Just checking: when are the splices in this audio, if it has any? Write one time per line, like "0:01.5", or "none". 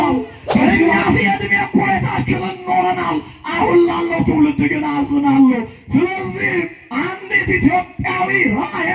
0:01.0